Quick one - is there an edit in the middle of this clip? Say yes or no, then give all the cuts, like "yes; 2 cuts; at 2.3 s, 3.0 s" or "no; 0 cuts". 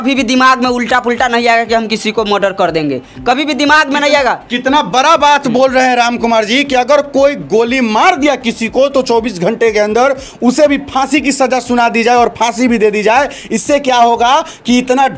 no; 0 cuts